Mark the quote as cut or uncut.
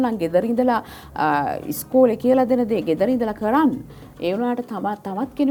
uncut